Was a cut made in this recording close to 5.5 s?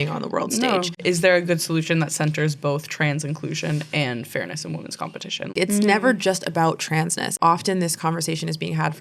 yes; 3 cuts; at 0.9 s, 5.5 s, 7.3 s

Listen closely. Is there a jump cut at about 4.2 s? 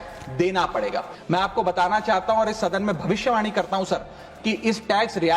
no; 1 cut; at 1.1 s

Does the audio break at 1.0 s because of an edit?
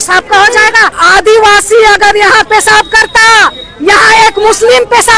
yes; 1 cut; at 1.0 s

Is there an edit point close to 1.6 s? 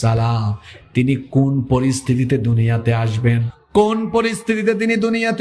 no; 1 cut; at 3.5 s

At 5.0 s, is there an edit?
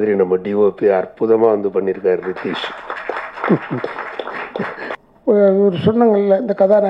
yes; 1 cut; at 5.0 s

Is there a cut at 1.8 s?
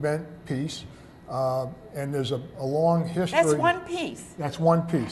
yes; 1 cut; at 1.8 s

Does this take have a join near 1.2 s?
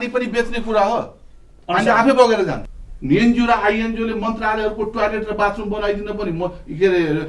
no; 1 cut; at 2.7 s

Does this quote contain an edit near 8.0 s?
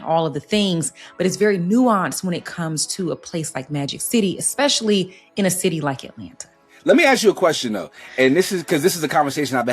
no; 1 cut; at 6.7 s

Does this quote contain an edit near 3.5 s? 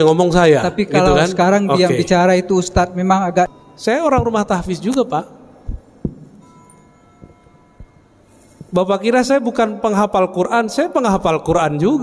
yes; 1 cut; at 3.5 s

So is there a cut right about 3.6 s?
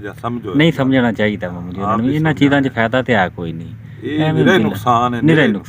no; 0 cuts

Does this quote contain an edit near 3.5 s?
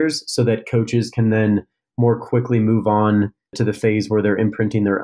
yes; 1 cut; at 3.5 s

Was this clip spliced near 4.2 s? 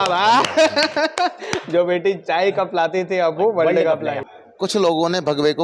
yes; 1 cut; at 4.2 s

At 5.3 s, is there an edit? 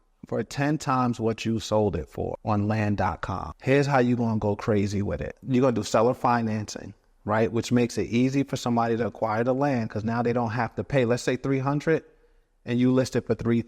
yes; 3 cuts; at 2.4 s, 3.5 s, 5.3 s

